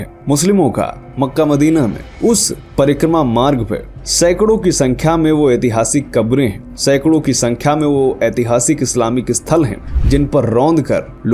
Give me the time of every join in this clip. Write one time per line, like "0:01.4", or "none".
none